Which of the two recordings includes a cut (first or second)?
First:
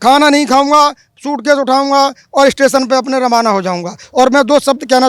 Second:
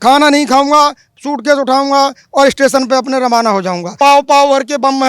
second